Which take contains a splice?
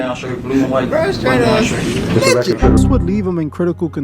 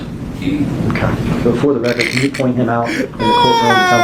first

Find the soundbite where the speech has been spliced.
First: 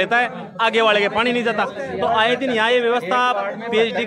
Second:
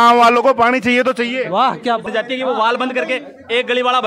second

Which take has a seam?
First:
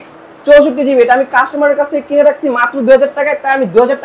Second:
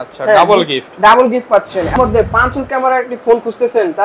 second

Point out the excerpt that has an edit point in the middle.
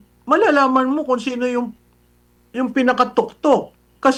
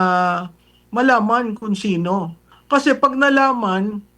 second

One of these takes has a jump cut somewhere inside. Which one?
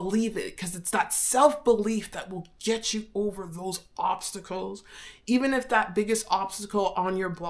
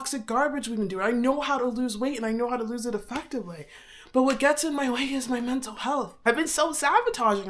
second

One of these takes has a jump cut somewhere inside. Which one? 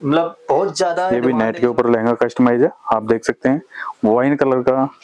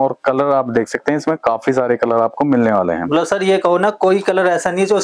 first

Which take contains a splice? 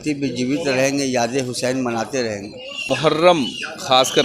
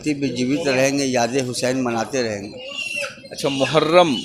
first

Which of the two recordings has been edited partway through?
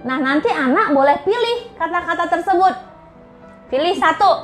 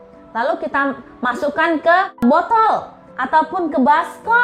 second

